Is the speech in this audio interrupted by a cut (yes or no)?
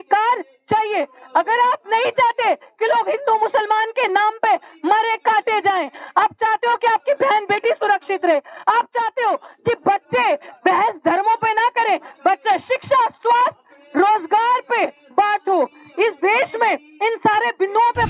no